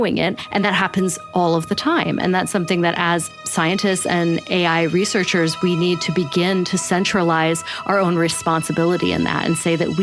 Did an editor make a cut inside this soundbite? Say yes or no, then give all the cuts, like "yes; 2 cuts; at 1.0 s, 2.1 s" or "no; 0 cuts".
yes; 1 cut; at 3.4 s